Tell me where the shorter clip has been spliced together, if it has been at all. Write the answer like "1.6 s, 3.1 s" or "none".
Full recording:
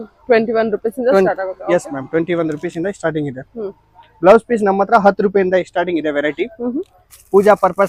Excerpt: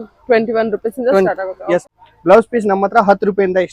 2.0 s